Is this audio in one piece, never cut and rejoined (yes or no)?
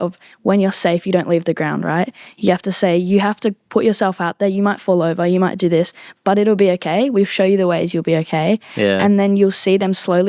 yes